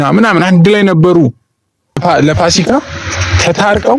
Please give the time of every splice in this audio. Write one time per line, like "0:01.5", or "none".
0:02.0